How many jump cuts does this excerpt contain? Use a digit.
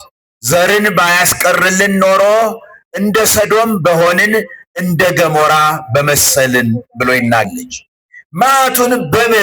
1